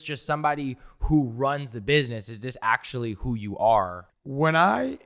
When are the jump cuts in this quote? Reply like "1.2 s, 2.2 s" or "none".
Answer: 4.0 s